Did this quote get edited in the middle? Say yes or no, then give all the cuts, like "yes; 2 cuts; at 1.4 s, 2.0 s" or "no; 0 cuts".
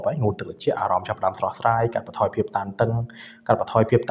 no; 0 cuts